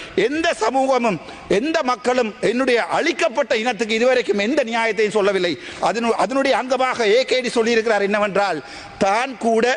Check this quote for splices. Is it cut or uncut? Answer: uncut